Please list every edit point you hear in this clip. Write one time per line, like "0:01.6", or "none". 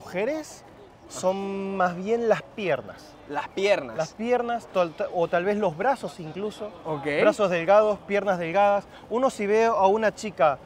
none